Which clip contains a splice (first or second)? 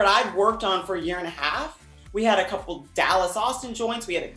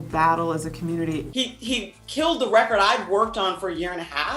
second